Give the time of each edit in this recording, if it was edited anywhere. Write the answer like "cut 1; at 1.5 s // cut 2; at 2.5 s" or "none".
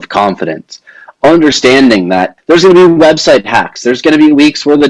cut 1; at 2.3 s